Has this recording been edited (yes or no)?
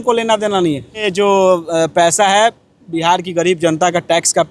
yes